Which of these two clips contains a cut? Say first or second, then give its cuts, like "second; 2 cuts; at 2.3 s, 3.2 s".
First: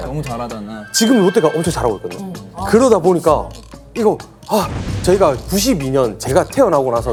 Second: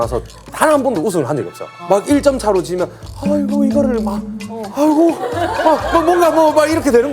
second; 1 cut; at 1.7 s